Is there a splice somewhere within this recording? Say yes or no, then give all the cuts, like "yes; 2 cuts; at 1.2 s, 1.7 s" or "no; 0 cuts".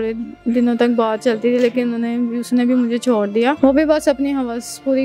yes; 1 cut; at 3.6 s